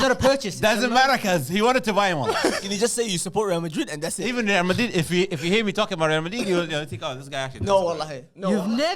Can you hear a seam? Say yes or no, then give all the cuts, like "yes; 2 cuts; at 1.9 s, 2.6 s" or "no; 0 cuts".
yes; 2 cuts; at 2.6 s, 4.2 s